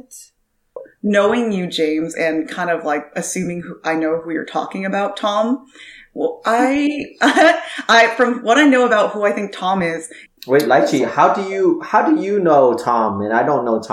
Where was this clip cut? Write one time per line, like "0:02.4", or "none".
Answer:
0:00.9
0:10.1